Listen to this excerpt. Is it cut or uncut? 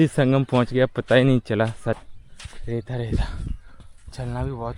cut